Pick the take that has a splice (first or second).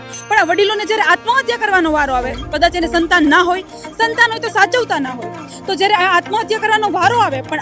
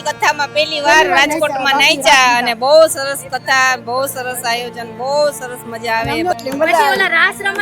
second